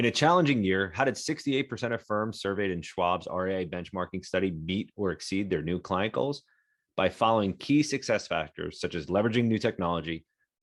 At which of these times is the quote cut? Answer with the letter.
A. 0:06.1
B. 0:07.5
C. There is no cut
C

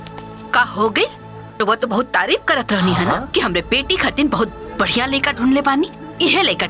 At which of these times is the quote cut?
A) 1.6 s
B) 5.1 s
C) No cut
A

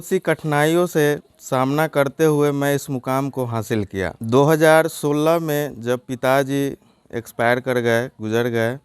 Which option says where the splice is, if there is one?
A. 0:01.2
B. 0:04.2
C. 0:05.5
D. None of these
B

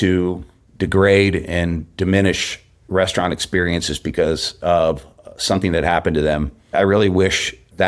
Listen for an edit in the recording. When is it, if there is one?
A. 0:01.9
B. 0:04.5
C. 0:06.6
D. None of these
C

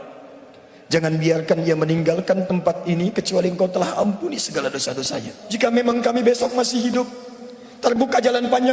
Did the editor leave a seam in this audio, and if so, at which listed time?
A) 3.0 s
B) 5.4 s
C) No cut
B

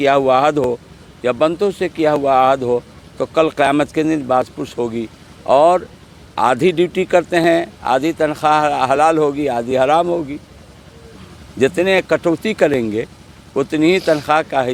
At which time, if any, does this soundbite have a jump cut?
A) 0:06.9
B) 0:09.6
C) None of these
C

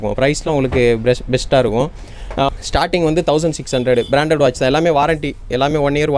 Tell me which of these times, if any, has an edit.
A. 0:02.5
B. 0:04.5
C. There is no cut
A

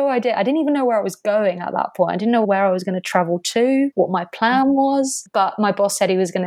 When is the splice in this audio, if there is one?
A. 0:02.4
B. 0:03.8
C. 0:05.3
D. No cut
A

